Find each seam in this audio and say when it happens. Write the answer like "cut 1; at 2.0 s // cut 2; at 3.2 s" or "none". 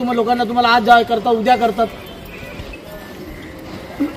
none